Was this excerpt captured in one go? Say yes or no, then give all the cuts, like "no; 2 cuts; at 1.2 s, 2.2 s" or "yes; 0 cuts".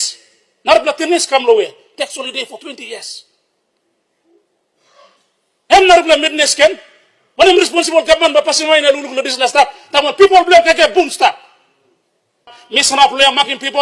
no; 1 cut; at 12.6 s